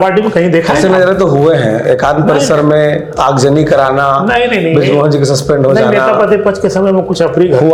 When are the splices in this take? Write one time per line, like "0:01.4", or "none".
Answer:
none